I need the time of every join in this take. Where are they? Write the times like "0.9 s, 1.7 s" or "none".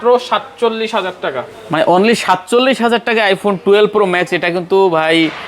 none